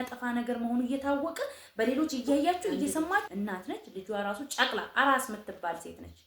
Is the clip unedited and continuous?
no; 1 cut; at 3.3 s

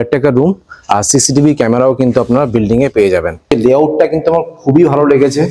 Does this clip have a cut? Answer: yes; 1 cut; at 3.5 s

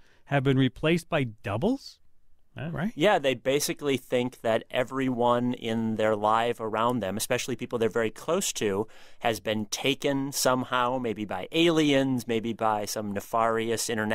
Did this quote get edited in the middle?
no; 0 cuts

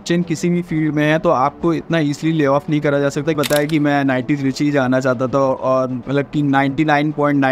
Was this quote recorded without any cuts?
no; 1 cut; at 3.4 s

